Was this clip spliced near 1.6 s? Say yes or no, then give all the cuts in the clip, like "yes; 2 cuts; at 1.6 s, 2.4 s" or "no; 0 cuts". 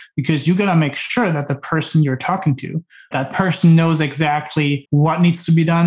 no; 2 cuts; at 3.1 s, 4.8 s